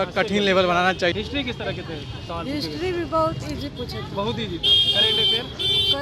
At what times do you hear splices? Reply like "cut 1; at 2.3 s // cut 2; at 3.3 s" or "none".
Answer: cut 1; at 1.1 s